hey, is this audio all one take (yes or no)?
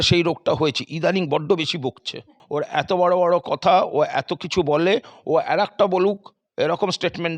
no